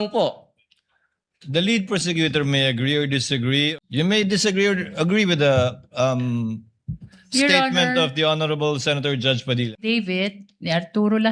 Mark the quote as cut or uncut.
cut